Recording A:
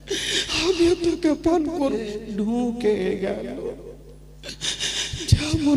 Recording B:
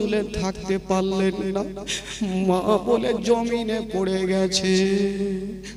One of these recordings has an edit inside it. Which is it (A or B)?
A